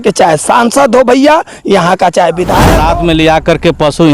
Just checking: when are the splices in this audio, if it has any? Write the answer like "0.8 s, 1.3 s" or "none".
2.7 s